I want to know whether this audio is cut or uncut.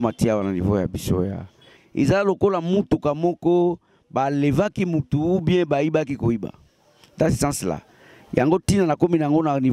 cut